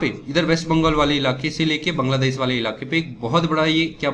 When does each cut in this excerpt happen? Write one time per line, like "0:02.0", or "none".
none